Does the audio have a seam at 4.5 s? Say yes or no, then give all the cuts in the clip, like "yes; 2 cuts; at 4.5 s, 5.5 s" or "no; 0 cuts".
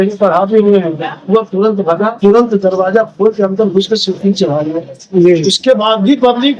no; 1 cut; at 2.2 s